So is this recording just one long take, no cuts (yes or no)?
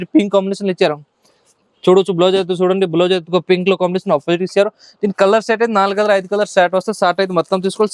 yes